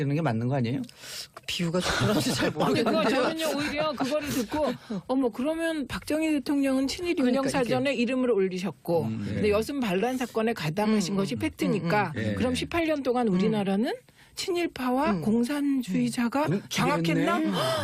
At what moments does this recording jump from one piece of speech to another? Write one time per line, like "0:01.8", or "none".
0:12.1